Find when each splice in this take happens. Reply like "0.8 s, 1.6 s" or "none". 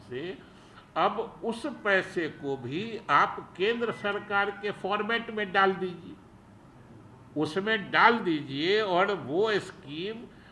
none